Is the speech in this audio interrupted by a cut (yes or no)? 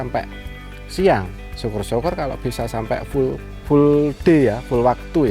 yes